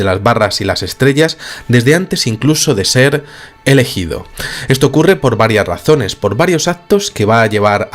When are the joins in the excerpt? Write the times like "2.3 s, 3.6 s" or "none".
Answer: 4.7 s